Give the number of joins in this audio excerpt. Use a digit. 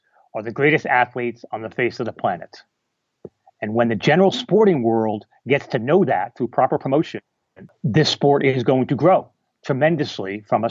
1